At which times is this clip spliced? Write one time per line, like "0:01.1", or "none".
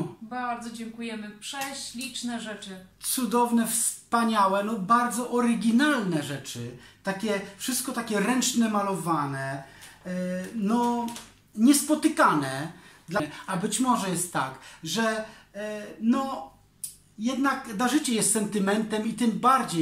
0:13.2